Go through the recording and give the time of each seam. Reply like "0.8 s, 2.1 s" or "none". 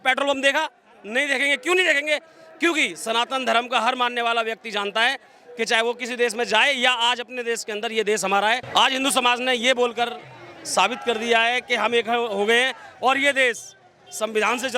8.6 s